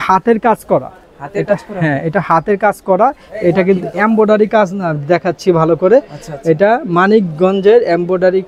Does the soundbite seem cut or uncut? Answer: uncut